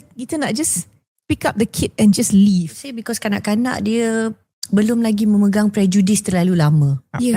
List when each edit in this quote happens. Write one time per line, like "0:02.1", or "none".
0:02.9